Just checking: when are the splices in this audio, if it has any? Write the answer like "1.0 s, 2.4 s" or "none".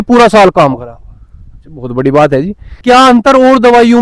2.8 s